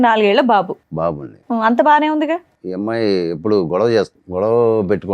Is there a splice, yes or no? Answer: yes